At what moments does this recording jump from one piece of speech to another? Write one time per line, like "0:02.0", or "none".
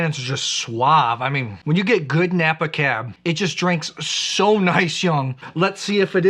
0:01.5
0:05.4